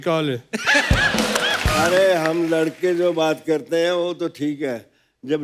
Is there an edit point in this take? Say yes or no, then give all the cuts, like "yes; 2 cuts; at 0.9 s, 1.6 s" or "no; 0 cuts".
yes; 1 cut; at 1.7 s